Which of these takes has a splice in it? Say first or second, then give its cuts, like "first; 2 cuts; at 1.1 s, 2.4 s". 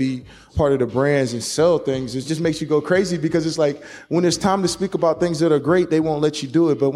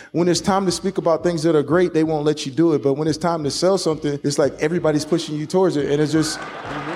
second; 1 cut; at 4.2 s